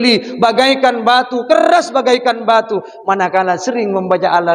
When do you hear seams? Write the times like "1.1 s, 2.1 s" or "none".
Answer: none